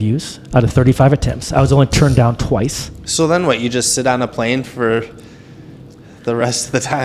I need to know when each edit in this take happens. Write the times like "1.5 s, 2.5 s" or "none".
none